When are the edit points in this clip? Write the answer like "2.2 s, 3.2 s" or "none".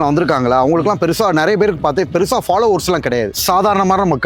3.3 s